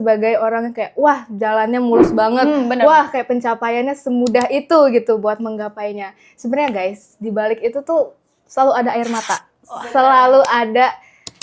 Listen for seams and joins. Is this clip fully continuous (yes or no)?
yes